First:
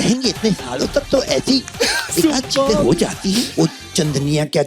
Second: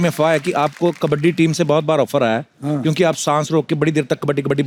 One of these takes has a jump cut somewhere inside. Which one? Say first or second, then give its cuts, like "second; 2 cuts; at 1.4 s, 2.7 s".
first; 1 cut; at 3.5 s